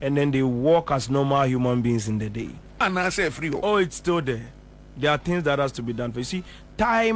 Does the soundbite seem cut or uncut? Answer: cut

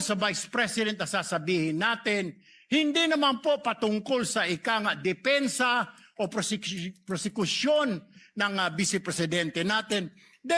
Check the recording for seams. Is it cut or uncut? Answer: uncut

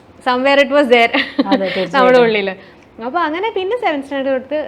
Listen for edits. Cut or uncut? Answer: uncut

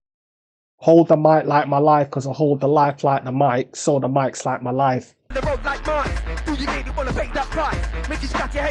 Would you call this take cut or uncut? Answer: uncut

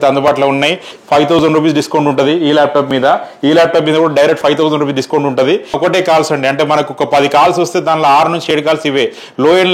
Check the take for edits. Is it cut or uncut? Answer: cut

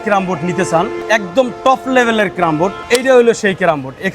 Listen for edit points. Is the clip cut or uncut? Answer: cut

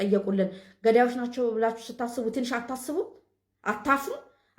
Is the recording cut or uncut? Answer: uncut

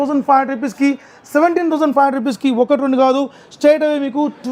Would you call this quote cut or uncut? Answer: uncut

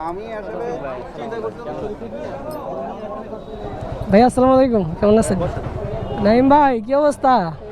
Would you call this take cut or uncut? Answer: cut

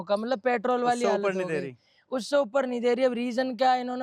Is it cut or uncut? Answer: uncut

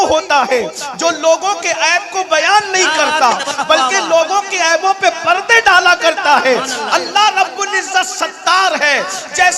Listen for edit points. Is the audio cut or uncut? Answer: uncut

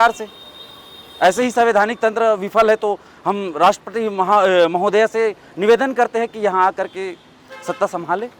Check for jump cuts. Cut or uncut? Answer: uncut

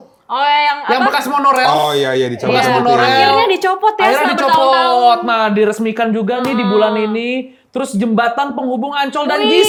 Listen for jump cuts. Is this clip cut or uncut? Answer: uncut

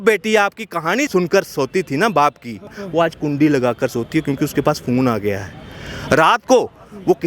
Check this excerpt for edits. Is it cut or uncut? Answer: cut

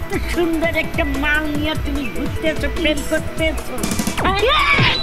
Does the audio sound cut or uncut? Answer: uncut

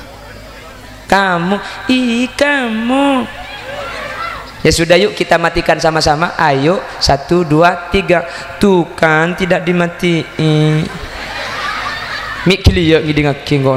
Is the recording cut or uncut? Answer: uncut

